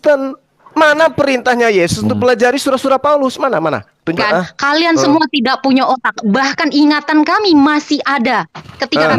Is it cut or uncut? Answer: cut